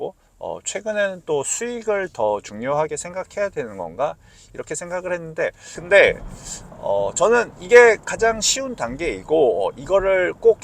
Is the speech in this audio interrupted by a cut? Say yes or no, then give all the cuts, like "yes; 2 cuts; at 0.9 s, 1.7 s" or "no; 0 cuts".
yes; 1 cut; at 5.7 s